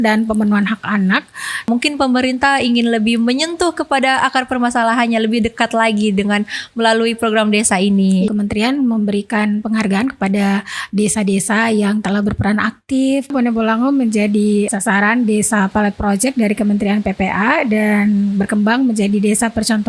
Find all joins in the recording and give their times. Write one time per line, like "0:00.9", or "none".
0:01.7
0:08.3
0:13.3
0:14.7